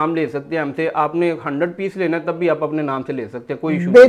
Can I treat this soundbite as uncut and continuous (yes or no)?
yes